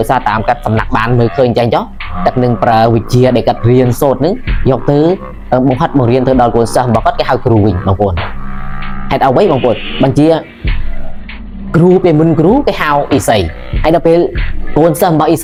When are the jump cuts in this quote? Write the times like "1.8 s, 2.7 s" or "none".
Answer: none

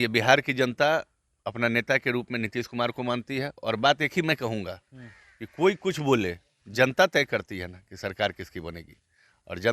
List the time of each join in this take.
none

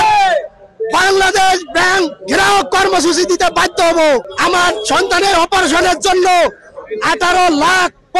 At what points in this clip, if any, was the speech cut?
4.3 s

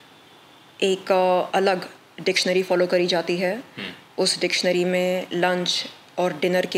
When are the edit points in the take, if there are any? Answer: none

